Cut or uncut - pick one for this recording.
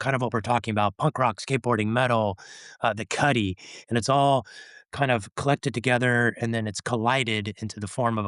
uncut